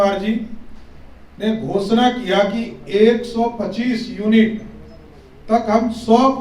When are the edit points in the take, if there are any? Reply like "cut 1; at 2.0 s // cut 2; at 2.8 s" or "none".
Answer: none